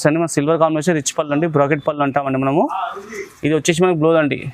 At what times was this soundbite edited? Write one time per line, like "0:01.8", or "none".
none